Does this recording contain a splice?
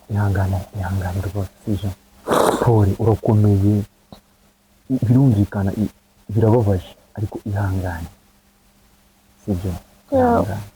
no; 0 cuts

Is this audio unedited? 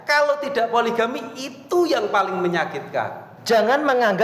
no; 1 cut; at 3.3 s

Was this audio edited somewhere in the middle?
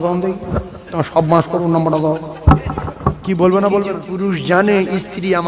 yes; 1 cut; at 4.0 s

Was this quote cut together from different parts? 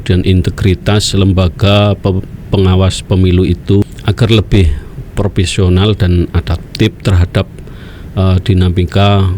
yes; 1 cut; at 3.8 s

